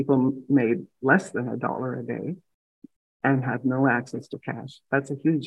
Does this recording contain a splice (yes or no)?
no